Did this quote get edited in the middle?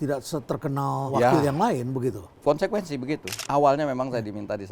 yes; 2 cuts; at 1.1 s, 3.3 s

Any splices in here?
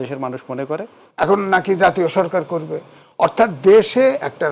yes; 1 cut; at 1.0 s

